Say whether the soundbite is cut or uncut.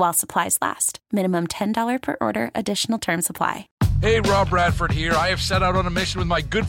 cut